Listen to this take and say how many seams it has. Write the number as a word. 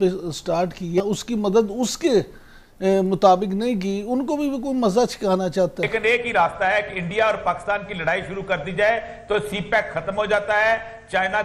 two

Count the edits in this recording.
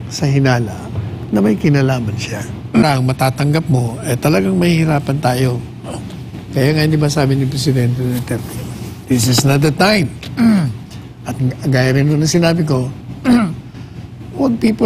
one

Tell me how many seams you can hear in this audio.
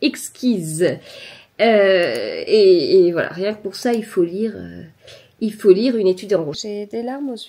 one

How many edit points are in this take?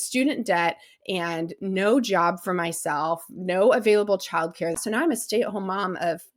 one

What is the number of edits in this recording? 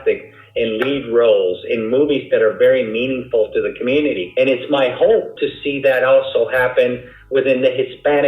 two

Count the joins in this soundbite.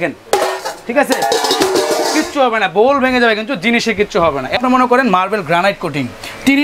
one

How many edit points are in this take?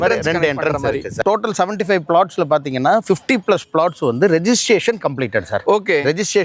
zero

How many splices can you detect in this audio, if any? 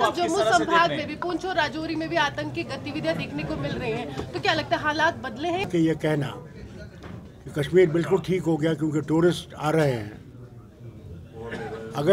one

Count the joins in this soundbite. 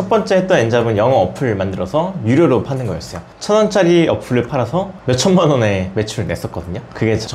zero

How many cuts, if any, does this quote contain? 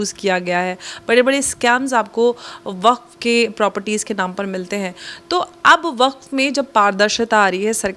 zero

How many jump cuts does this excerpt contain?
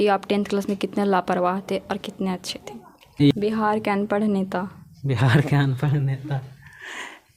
one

